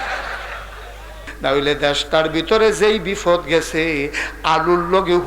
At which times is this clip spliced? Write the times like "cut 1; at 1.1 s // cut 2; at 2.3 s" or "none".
cut 1; at 1.3 s